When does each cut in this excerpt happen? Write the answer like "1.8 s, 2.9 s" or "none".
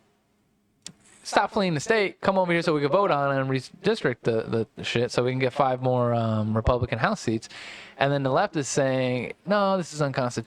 none